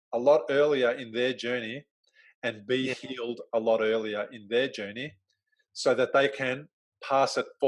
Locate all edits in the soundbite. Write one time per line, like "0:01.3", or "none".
none